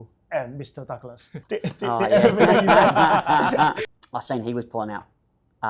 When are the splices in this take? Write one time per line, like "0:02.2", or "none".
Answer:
0:03.8